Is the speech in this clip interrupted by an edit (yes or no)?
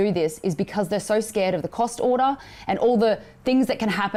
no